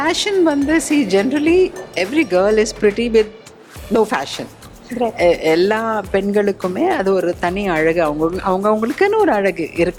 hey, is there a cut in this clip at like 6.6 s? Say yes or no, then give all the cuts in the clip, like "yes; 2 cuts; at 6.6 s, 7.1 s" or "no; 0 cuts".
no; 0 cuts